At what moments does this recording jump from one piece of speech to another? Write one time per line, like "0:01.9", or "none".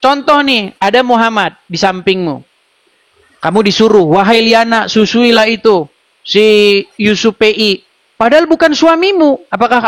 none